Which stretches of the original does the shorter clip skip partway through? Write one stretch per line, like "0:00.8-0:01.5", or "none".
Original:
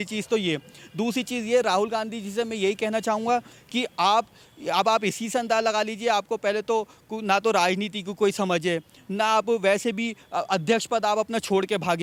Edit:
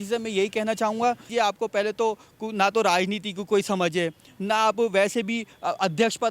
0:03.5-0:05.9